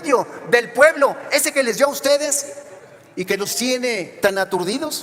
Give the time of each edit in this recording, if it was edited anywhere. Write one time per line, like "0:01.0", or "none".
none